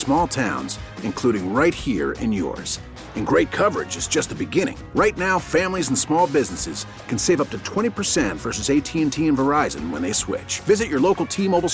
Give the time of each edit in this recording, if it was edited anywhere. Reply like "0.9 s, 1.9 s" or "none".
none